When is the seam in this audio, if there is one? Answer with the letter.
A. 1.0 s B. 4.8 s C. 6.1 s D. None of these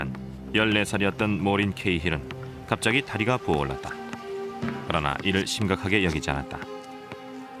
C